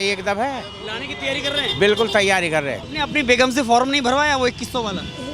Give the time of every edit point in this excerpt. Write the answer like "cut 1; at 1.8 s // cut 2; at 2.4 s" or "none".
cut 1; at 2.9 s